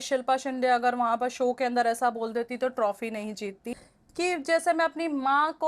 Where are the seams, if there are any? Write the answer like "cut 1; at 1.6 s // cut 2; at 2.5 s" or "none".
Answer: cut 1; at 3.7 s